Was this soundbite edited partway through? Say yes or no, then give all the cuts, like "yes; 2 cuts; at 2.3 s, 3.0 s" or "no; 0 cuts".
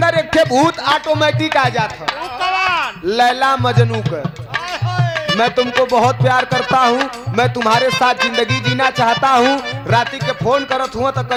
no; 0 cuts